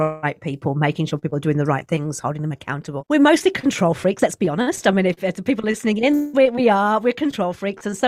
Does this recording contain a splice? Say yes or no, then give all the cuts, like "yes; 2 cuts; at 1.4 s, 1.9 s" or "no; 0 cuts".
yes; 1 cut; at 2.9 s